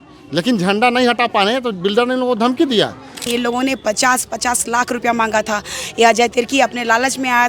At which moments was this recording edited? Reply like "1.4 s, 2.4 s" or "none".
3.3 s

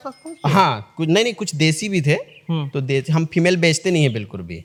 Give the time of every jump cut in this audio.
none

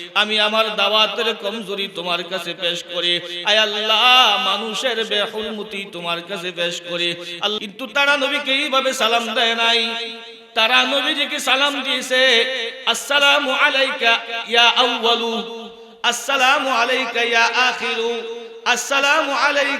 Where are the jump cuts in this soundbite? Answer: 7.6 s

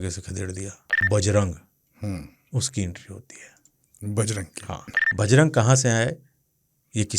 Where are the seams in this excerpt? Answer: 0.9 s, 5.0 s

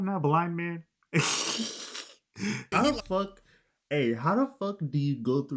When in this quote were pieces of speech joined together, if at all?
2.7 s

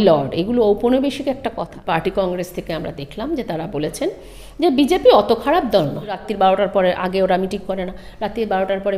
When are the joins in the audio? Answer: 1.7 s, 6.3 s

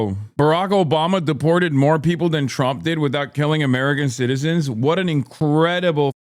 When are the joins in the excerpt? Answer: 5.3 s

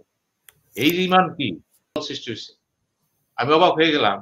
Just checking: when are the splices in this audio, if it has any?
2.0 s

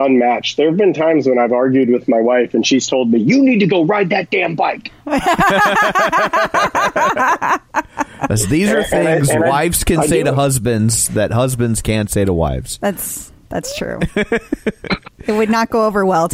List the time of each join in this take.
14.9 s

